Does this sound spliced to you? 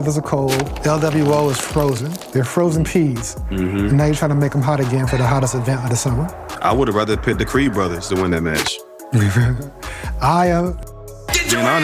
no; 0 cuts

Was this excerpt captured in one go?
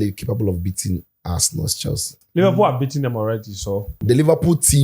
no; 2 cuts; at 2.1 s, 3.9 s

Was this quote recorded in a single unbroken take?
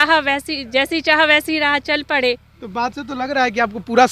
yes; 0 cuts

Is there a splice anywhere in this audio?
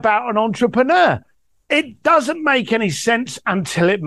no; 0 cuts

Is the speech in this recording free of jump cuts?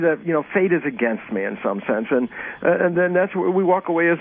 no; 1 cut; at 1.2 s

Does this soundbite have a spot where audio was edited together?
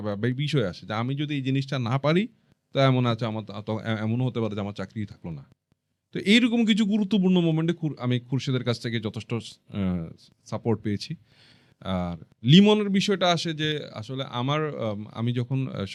no; 0 cuts

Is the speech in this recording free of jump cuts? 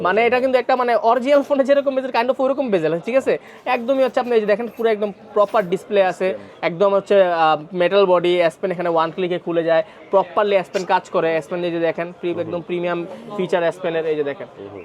yes; 0 cuts

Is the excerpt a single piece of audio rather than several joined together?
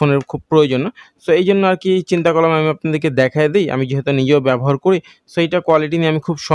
yes; 0 cuts

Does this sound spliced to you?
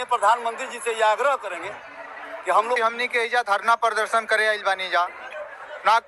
yes; 1 cut; at 2.8 s

